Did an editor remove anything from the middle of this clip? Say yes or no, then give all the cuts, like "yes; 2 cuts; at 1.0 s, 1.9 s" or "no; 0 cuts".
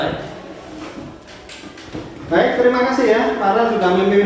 no; 0 cuts